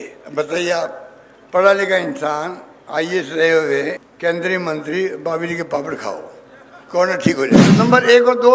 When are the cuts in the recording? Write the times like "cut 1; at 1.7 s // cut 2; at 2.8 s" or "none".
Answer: cut 1; at 4.1 s // cut 2; at 7.8 s